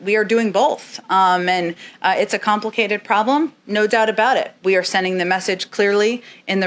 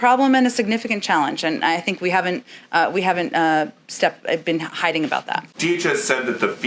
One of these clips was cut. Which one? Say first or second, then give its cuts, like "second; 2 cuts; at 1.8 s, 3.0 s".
second; 1 cut; at 5.5 s